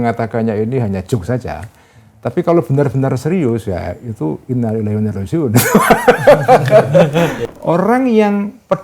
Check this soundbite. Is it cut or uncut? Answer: cut